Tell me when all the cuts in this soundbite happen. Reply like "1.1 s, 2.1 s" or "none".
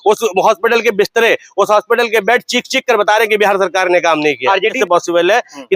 4.8 s